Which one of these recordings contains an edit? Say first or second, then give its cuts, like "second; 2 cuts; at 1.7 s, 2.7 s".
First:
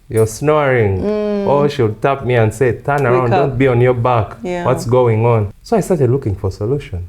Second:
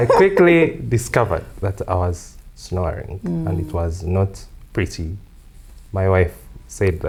first; 1 cut; at 5.5 s